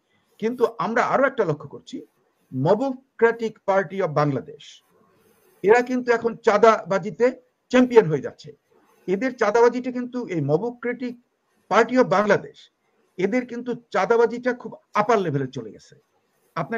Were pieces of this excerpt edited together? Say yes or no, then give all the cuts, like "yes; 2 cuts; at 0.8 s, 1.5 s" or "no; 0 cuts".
no; 0 cuts